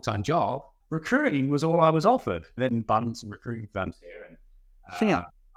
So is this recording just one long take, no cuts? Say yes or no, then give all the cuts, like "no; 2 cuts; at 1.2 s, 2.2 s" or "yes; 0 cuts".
yes; 0 cuts